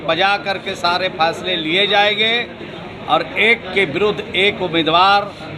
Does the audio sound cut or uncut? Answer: uncut